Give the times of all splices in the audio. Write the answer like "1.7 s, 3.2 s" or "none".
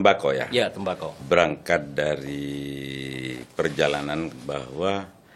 none